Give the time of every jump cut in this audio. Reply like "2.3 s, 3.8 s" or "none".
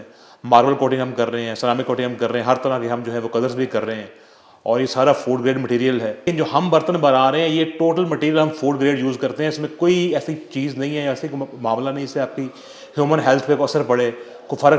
6.2 s